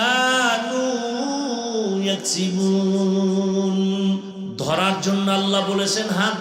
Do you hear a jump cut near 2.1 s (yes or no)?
no